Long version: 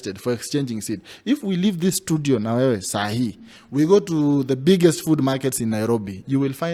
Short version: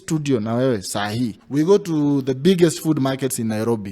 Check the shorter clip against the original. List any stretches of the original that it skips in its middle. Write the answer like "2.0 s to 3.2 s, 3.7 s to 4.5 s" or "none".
3.4 s to 3.6 s